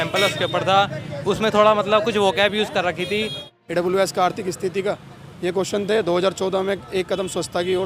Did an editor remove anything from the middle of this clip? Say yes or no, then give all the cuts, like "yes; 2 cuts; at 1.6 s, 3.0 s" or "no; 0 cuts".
yes; 1 cut; at 3.4 s